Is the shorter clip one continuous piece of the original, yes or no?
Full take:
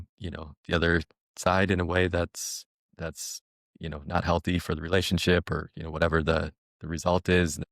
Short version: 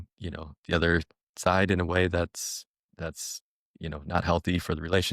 yes